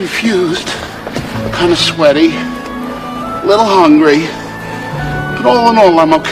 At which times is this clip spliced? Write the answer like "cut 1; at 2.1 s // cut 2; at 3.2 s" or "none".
none